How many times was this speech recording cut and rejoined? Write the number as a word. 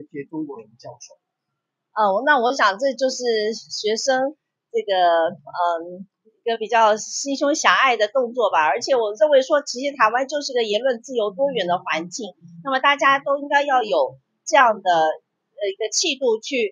zero